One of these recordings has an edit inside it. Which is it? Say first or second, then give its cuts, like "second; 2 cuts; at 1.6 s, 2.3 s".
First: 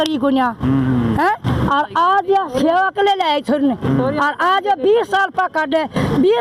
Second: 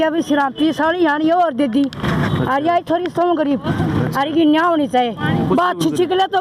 second; 1 cut; at 5.5 s